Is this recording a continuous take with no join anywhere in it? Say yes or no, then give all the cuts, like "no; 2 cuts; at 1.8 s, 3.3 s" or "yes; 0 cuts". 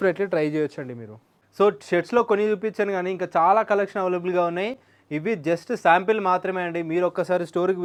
yes; 0 cuts